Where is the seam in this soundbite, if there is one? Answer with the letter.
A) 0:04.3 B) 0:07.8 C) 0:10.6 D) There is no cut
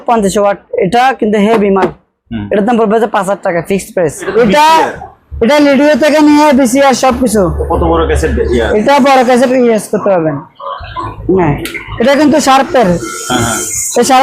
A